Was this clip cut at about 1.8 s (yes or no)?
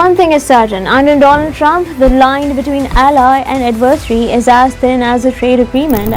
no